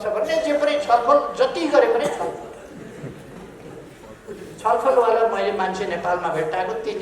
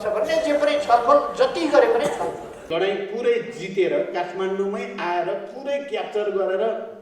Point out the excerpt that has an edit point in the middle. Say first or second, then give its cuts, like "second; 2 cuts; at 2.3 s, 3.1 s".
second; 1 cut; at 2.6 s